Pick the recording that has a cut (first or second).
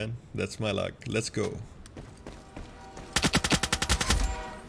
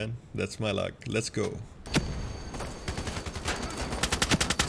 second